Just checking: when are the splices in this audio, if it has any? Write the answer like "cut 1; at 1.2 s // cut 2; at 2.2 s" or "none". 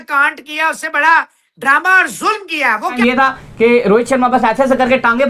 cut 1; at 2.8 s